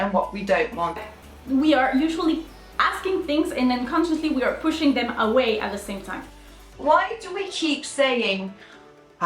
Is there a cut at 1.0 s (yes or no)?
yes